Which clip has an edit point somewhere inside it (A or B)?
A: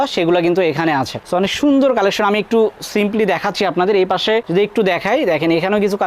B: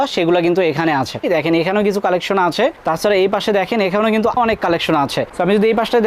B